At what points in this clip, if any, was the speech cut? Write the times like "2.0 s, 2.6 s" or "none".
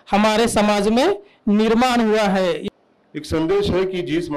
2.7 s